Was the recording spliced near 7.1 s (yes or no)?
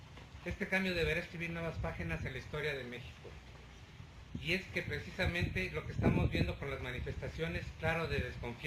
yes